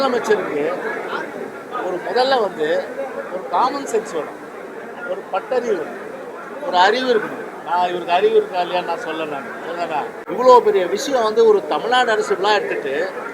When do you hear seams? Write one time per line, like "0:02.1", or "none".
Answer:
0:10.2